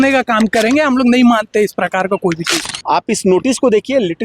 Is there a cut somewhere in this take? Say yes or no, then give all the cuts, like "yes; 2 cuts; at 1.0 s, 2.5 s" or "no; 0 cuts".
yes; 1 cut; at 2.8 s